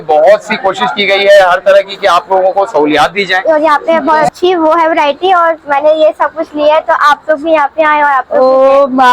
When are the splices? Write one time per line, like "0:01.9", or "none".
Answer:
0:03.4

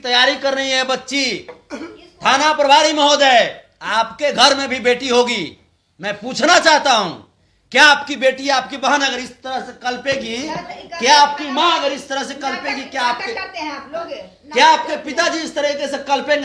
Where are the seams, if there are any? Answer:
none

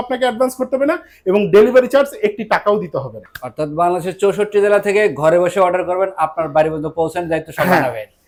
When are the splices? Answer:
none

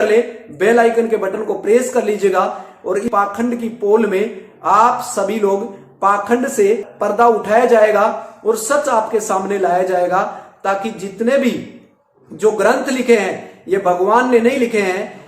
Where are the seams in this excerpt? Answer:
0:03.1
0:06.9

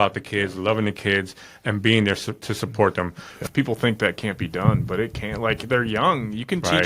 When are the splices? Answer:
0:03.4

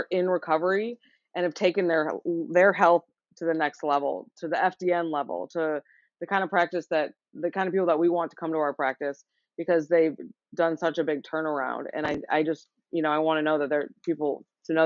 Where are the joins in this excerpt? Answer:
none

